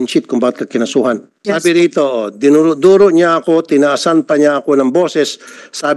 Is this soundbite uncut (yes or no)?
no